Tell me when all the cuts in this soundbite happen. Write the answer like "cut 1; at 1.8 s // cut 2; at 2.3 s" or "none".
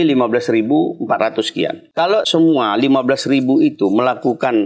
cut 1; at 2.2 s